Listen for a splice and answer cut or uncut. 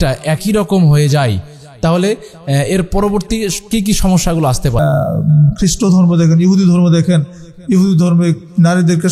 cut